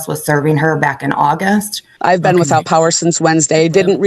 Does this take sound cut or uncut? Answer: cut